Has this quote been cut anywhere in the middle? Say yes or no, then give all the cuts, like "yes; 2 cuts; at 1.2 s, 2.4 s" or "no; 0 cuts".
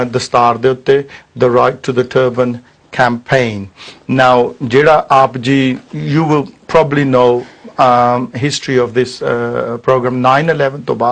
no; 0 cuts